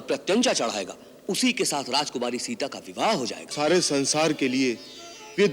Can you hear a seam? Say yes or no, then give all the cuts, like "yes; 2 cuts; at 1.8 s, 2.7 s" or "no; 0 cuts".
yes; 1 cut; at 3.5 s